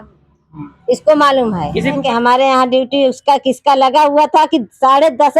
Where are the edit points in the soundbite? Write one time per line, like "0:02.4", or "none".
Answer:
0:02.0